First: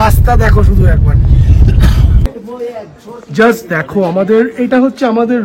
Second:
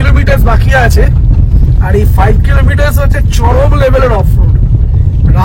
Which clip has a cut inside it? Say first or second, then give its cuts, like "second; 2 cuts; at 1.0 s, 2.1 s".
first; 1 cut; at 2.2 s